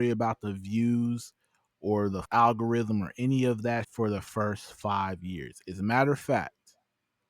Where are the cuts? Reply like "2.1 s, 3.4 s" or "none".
3.9 s

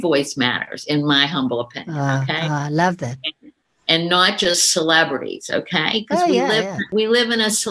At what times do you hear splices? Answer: 6.8 s

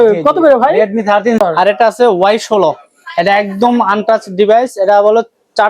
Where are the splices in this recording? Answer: 1.4 s

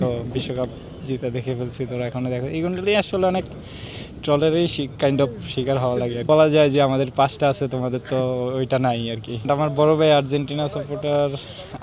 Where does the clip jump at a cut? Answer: 6.2 s, 9.4 s

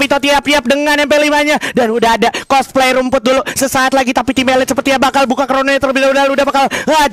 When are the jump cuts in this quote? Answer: none

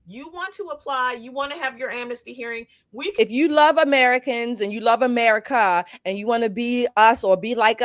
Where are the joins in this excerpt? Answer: 3.1 s

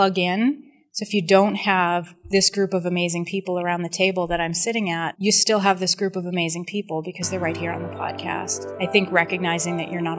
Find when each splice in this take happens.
none

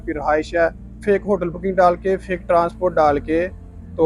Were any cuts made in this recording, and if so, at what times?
1.0 s

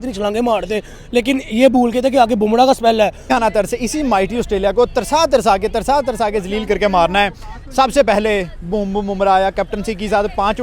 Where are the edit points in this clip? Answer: 3.3 s

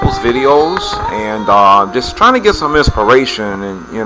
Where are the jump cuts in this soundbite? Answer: 1.6 s

